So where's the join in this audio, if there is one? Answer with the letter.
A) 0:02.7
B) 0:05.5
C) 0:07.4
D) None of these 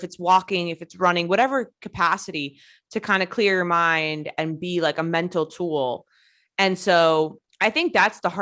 C